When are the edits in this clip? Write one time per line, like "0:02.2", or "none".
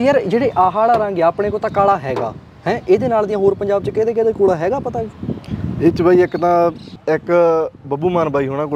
0:06.9

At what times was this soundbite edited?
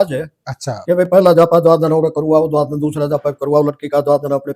none

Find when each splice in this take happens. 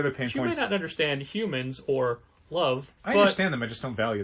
0:02.9

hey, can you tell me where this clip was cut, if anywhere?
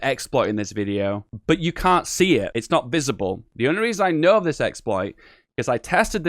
0:01.3
0:02.5
0:03.5

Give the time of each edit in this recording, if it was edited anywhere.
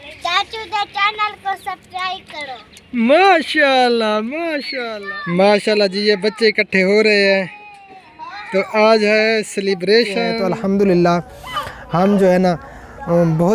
0:04.7
0:10.4

